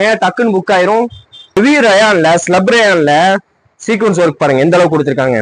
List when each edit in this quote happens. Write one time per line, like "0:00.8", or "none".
0:01.6